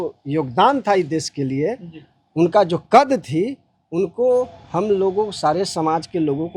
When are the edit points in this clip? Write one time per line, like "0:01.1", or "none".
none